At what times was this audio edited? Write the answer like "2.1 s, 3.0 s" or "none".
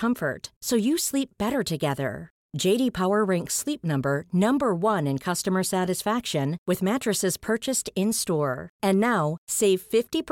none